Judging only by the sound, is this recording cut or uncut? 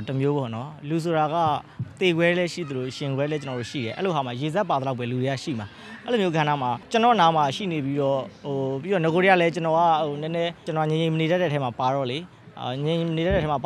cut